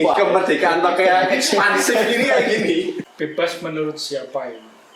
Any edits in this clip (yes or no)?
yes